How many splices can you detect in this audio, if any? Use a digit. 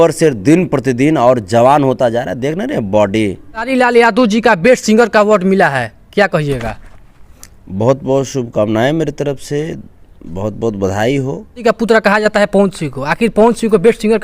2